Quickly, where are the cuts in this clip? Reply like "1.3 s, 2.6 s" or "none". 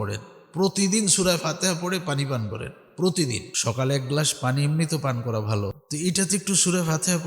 3.5 s, 5.8 s